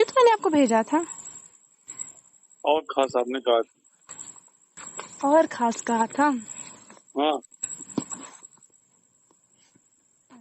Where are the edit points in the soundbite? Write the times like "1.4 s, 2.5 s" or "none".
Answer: 3.1 s